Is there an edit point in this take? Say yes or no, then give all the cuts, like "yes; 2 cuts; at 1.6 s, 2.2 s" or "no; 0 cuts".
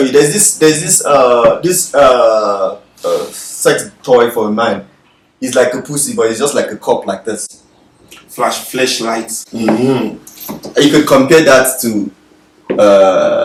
no; 0 cuts